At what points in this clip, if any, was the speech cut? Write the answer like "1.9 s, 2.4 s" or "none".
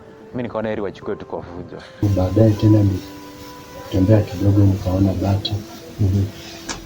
2.0 s